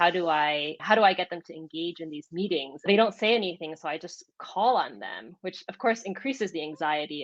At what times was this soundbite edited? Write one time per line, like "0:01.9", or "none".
0:02.9